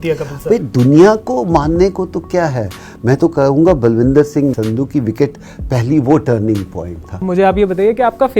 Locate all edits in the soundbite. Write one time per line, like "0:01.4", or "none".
0:04.6
0:07.2